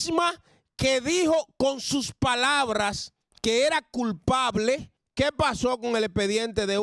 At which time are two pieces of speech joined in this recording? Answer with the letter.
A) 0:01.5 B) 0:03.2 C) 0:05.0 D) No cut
C